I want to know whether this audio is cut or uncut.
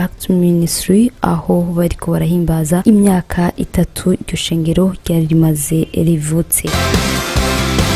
uncut